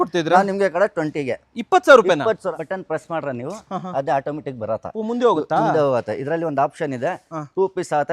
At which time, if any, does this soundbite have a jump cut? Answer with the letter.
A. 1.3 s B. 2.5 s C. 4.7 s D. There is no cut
B